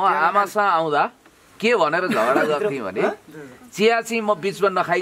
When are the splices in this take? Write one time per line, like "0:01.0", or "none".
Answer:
none